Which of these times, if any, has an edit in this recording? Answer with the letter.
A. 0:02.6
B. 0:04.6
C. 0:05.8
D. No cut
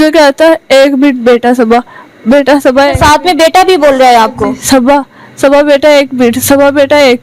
D